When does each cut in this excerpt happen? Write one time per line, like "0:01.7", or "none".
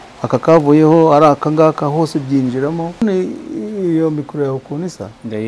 0:03.0

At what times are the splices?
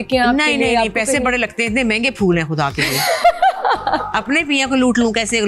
none

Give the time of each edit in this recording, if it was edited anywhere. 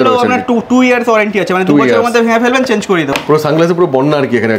0:03.1

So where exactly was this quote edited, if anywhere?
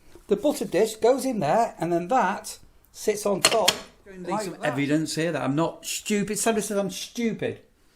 0:04.5

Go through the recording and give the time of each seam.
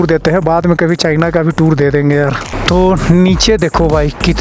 0:02.5

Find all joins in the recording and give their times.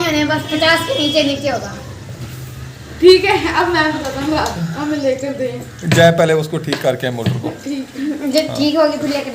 0:05.0

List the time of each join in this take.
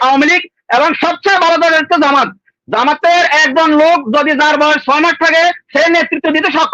none

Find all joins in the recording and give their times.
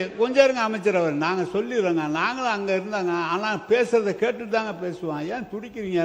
none

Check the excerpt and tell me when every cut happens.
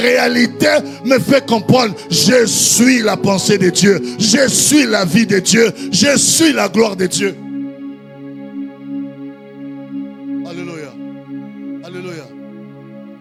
none

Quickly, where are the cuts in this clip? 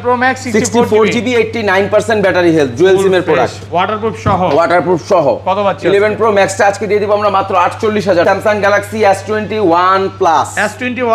0:08.2

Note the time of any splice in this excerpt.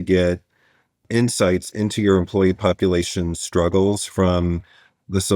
0:01.0

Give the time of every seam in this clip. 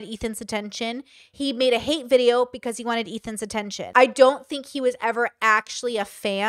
0:03.8

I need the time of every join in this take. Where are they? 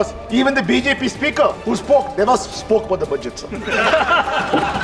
0:01.6

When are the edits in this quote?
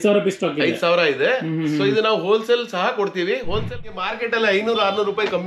0:03.9

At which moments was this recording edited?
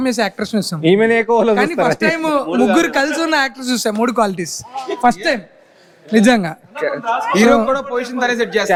none

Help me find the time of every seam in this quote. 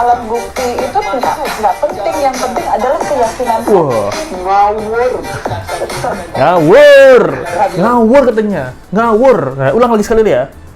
none

